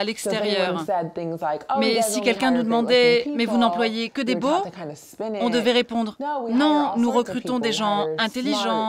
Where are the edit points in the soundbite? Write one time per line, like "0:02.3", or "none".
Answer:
none